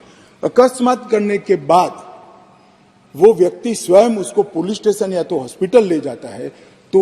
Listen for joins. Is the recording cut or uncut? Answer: uncut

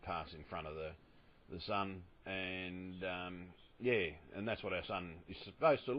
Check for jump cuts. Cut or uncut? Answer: uncut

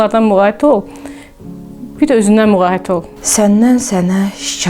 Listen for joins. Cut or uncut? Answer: cut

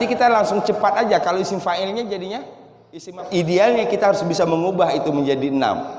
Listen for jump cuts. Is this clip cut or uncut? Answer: cut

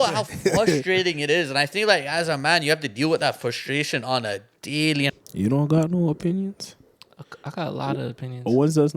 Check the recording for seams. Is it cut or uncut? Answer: cut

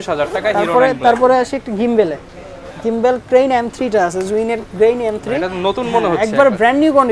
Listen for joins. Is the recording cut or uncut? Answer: uncut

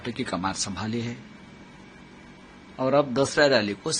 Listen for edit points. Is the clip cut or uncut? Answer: uncut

